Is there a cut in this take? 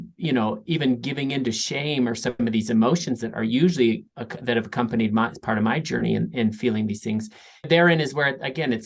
yes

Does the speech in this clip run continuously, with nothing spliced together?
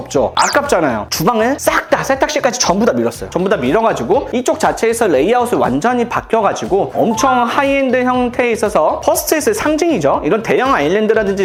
yes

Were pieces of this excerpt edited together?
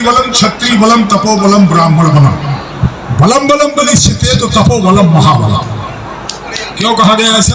no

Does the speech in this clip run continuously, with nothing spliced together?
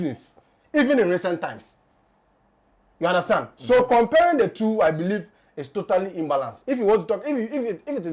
yes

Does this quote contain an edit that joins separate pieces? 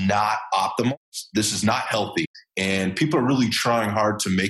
yes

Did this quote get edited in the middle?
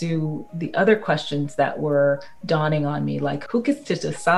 yes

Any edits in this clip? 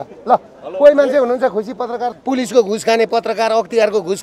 yes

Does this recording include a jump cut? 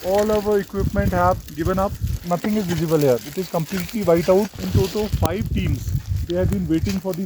yes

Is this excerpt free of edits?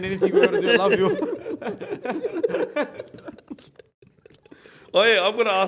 yes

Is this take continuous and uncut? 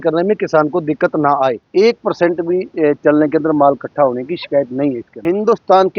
no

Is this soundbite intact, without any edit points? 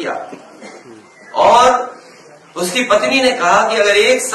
yes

